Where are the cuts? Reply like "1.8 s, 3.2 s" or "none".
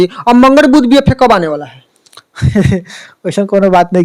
none